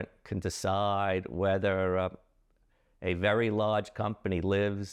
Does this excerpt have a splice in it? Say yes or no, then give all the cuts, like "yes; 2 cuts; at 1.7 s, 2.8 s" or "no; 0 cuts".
no; 0 cuts